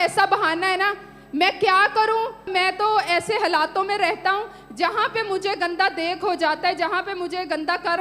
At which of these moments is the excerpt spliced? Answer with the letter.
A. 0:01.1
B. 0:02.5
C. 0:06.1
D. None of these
B